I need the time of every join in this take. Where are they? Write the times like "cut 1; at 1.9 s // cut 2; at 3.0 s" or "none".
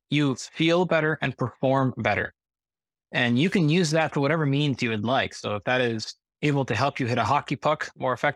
none

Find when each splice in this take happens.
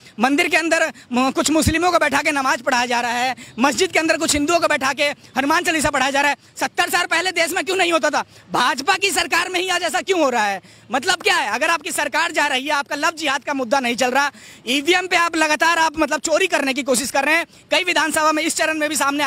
none

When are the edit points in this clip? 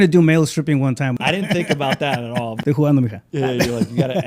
cut 1; at 1.2 s // cut 2; at 2.5 s

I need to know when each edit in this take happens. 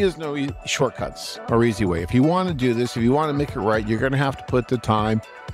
none

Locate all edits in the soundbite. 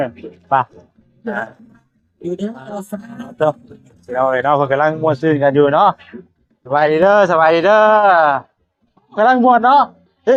none

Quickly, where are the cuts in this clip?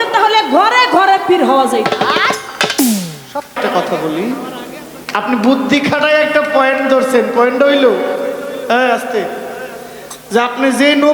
cut 1; at 3.5 s

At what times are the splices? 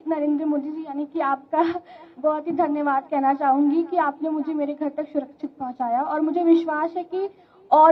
none

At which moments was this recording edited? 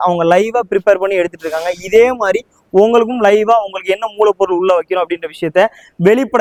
none

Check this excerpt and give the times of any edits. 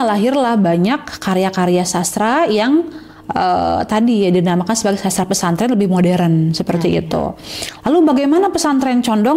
none

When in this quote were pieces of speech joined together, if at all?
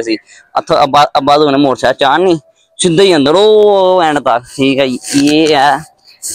cut 1; at 4.7 s

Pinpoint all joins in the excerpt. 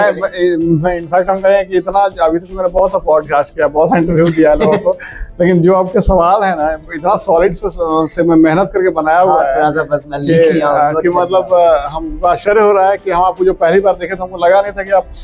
none

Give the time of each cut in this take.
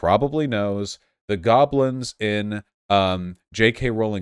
none

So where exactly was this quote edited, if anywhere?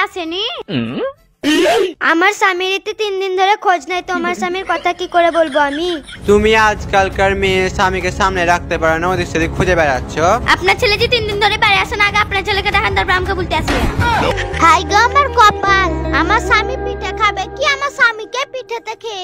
cut 1; at 6.1 s // cut 2; at 10.4 s // cut 3; at 14.3 s

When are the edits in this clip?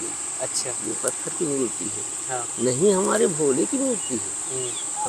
none

